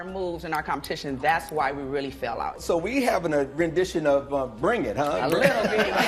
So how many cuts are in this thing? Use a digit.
1